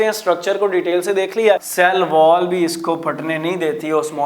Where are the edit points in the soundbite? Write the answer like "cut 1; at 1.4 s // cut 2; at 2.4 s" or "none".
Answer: cut 1; at 1.7 s